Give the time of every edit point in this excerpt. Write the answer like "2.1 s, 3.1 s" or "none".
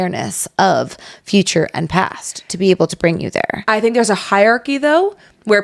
none